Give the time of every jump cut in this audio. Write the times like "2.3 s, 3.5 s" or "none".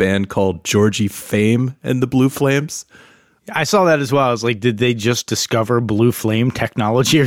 3.1 s, 5.3 s